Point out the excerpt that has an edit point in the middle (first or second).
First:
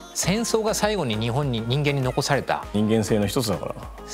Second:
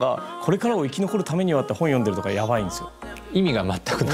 first